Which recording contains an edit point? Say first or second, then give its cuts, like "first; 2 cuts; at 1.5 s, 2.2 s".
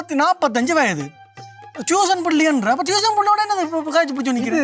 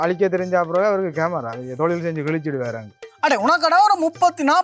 second; 1 cut; at 3.1 s